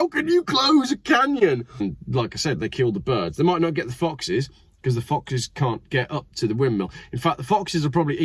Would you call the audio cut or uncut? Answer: cut